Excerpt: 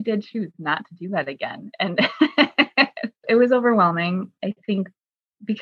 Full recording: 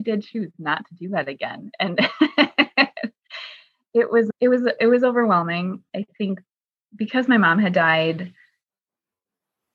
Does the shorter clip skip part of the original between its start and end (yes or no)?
yes